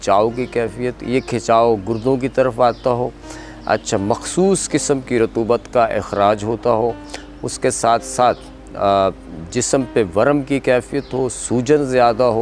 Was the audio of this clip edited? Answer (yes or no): no